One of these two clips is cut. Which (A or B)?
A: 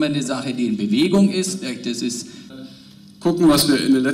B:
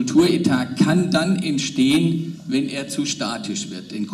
A